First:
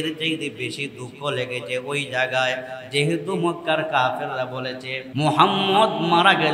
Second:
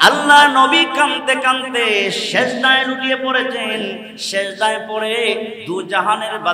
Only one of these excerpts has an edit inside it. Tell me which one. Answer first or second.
first